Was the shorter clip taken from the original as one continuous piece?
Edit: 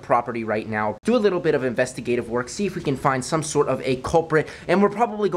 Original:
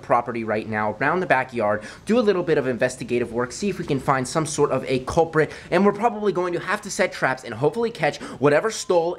no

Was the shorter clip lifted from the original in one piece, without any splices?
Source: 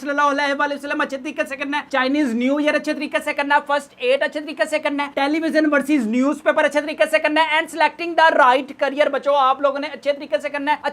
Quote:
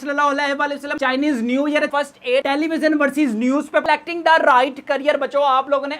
no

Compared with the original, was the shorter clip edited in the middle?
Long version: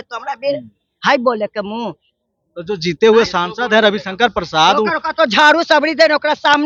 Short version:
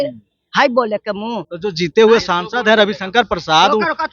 yes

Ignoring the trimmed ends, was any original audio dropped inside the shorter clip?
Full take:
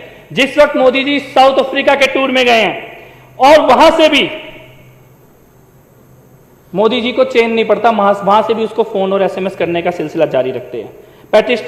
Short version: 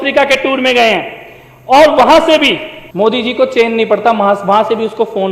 yes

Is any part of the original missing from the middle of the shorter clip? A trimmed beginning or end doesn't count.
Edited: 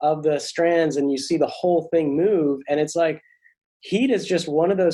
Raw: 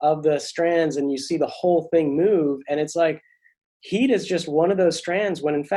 no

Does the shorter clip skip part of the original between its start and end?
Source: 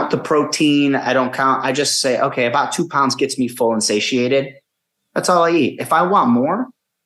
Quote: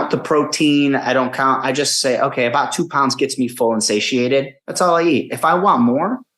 yes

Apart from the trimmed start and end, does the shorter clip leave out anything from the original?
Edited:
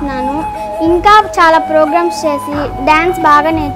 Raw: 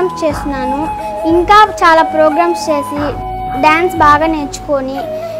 yes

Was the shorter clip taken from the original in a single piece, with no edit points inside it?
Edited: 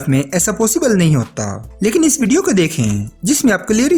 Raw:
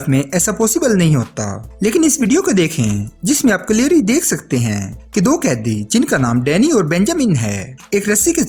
yes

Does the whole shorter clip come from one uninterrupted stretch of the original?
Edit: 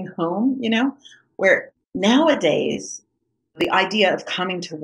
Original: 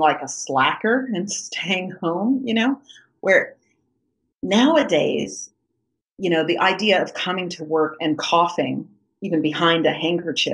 no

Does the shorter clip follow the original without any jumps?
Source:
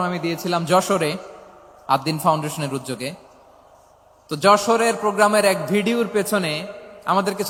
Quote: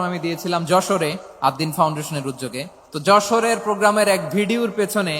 no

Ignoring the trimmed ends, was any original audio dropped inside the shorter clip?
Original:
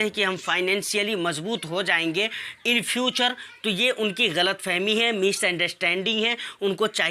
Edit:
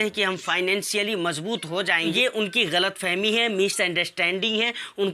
yes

